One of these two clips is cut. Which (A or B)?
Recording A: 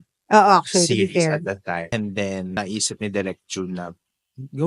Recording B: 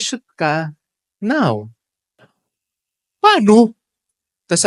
A